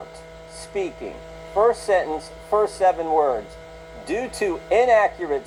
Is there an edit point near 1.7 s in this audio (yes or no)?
no